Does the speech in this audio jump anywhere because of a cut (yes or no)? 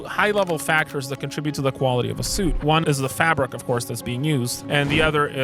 yes